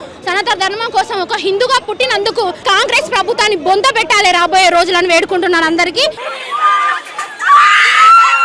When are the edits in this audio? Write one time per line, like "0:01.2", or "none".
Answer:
0:02.6
0:06.2